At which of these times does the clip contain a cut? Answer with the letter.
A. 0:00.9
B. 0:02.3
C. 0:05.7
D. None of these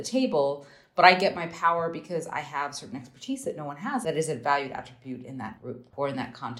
C